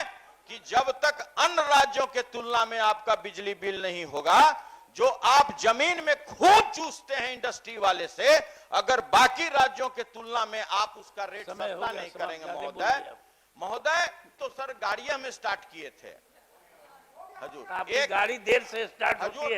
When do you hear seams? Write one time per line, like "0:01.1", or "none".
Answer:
0:14.3